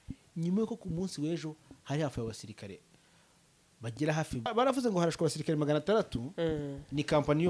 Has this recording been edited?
yes; 1 cut; at 4.5 s

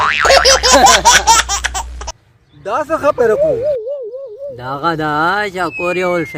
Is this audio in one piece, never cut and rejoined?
yes; 0 cuts

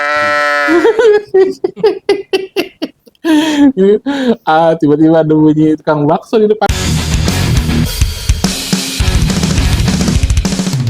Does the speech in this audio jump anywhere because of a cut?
yes; 1 cut; at 6.7 s

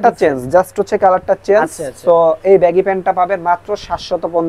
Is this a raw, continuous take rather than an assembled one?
yes; 0 cuts

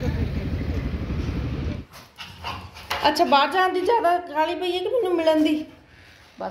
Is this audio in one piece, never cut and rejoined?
no; 1 cut; at 1.8 s

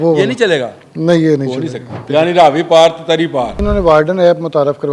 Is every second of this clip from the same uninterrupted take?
no; 2 cuts; at 1.9 s, 3.6 s

